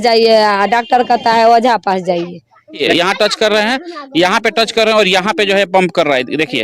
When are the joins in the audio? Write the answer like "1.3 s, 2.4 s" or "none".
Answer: 2.8 s